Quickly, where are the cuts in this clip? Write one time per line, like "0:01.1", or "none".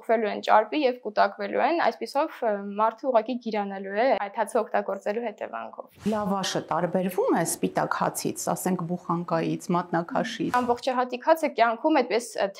0:06.1
0:10.5